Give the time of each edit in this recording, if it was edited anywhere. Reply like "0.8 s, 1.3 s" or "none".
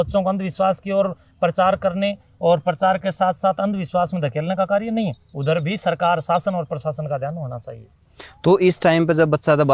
none